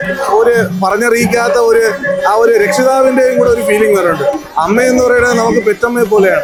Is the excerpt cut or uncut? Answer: uncut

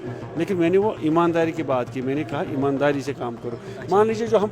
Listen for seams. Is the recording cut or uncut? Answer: uncut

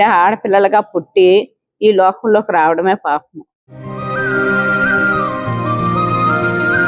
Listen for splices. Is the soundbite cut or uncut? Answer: uncut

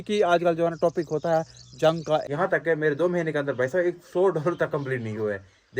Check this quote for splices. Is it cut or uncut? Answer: cut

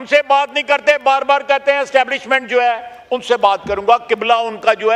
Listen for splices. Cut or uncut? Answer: uncut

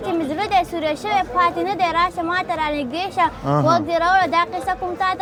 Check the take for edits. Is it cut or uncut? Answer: uncut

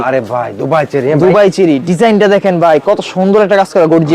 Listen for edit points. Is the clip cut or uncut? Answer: uncut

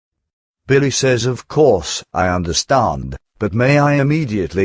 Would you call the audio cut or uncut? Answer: uncut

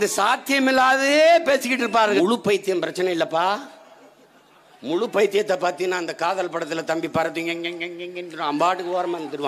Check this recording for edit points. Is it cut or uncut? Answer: cut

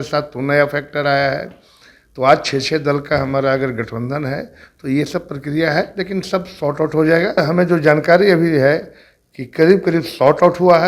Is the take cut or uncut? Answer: cut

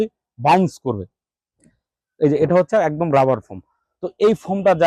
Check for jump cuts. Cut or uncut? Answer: uncut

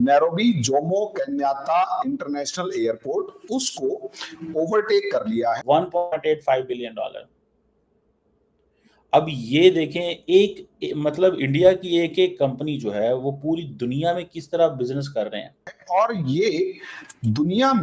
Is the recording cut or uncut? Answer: cut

